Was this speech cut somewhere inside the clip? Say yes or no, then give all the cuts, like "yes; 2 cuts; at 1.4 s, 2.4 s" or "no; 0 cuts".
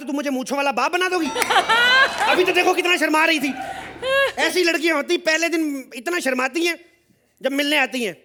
no; 0 cuts